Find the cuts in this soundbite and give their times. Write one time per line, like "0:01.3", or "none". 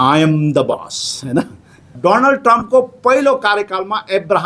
0:01.9